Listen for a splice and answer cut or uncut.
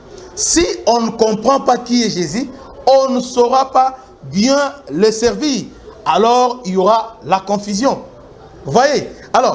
uncut